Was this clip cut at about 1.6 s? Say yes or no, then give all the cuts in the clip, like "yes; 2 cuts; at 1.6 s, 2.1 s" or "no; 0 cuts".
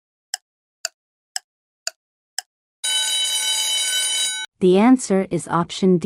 no; 1 cut; at 4.5 s